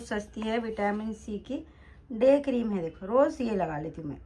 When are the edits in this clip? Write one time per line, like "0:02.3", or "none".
none